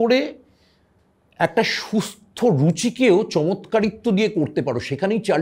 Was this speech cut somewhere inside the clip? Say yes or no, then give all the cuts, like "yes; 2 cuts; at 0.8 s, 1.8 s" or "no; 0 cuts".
no; 0 cuts